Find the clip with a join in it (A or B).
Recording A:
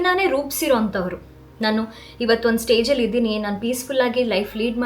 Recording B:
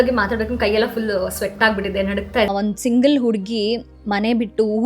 B